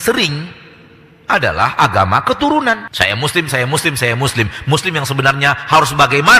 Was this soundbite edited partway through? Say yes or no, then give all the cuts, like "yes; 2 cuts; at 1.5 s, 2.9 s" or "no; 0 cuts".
yes; 1 cut; at 2.9 s